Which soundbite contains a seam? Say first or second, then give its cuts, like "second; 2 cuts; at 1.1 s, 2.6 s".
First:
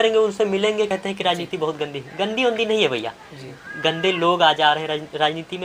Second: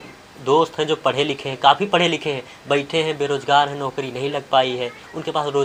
first; 1 cut; at 0.9 s